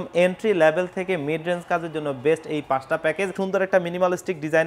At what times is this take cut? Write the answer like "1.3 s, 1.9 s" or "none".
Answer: 3.3 s